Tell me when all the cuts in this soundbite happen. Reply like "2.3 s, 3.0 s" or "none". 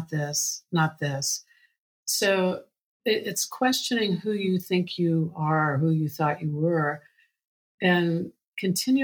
none